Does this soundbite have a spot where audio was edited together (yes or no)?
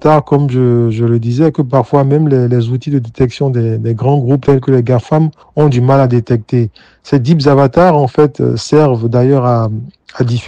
no